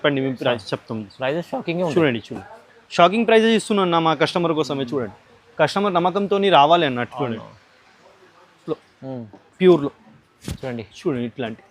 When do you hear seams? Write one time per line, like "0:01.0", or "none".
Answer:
0:08.6